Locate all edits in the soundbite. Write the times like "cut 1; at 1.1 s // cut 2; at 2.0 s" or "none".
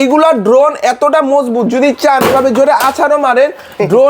none